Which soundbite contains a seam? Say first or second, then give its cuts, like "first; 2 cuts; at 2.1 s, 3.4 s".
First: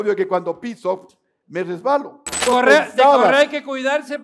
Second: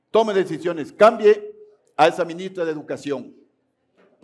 first; 1 cut; at 2.4 s